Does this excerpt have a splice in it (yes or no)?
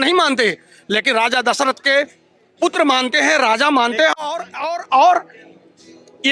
no